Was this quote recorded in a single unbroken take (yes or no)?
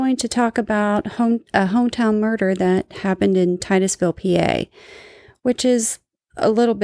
yes